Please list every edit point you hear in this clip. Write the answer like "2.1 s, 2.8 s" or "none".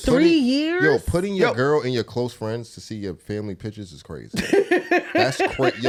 none